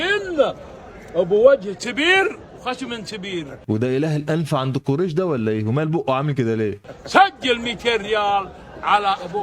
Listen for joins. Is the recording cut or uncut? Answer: uncut